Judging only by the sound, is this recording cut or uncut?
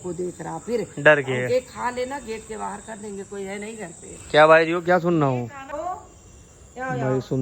cut